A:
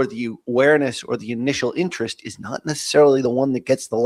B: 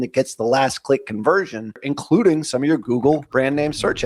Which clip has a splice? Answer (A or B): B